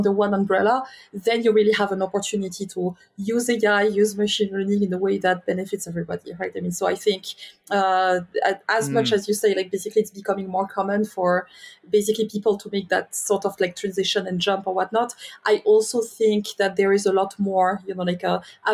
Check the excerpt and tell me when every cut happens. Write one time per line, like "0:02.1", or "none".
none